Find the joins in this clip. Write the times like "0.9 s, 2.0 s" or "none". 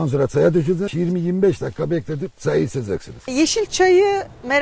3.3 s

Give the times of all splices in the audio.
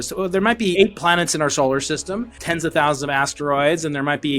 0.7 s, 2.4 s

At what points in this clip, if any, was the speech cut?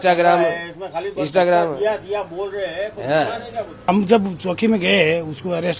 3.9 s

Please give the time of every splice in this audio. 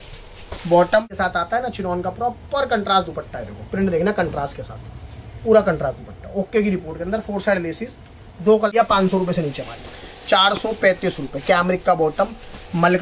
1.1 s, 8.7 s

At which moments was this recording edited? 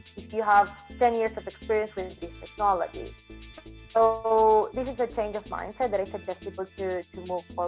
none

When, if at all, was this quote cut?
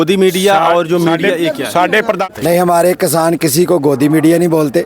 2.3 s

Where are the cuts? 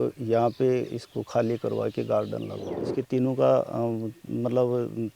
2.8 s

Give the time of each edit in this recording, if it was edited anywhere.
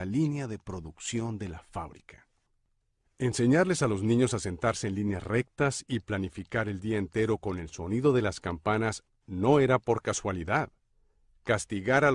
9.6 s

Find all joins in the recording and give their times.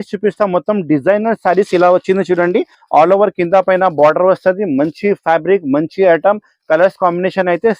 2.8 s

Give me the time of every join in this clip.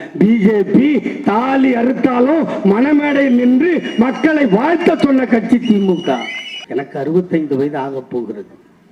none

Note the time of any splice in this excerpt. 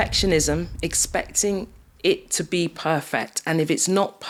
none

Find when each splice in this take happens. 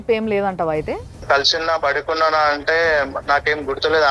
1.2 s

